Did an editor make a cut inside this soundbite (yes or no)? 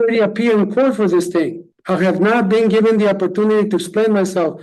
no